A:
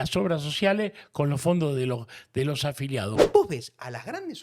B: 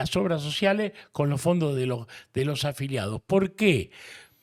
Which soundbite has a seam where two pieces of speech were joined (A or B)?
A